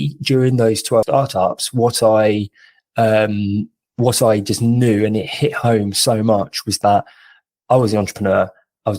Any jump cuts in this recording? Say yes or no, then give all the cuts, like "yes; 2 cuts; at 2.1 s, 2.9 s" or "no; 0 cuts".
yes; 1 cut; at 0.9 s